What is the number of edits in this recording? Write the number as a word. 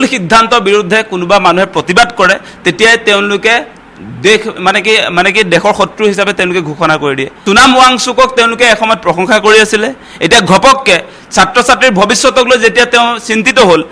one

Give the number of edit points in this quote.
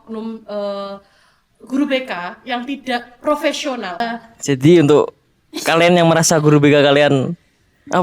one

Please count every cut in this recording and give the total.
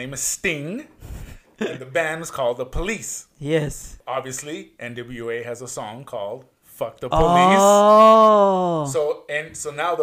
one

